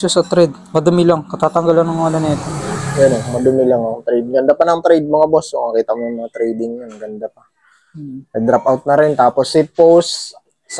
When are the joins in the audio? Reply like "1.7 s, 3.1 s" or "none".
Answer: none